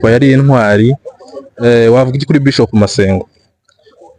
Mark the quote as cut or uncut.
uncut